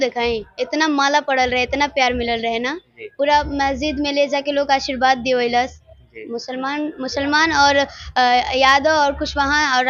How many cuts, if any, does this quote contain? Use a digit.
0